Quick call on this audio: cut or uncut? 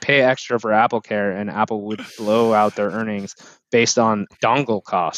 cut